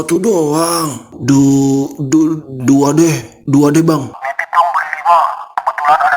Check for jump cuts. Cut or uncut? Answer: cut